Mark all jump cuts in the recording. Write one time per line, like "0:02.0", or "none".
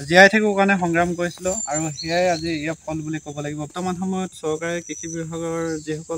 0:03.7